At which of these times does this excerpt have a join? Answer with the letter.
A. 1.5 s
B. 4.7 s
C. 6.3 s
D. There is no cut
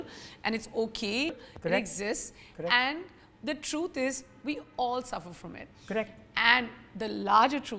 A